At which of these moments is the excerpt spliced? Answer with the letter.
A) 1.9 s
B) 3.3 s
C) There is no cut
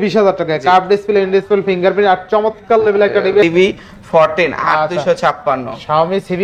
B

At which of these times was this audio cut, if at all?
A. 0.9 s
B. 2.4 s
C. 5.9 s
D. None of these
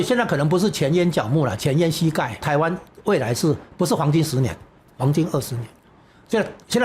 B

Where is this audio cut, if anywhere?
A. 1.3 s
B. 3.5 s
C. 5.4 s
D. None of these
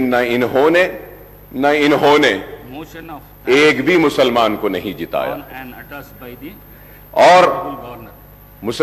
D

